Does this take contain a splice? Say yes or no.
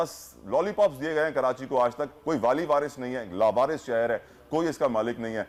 no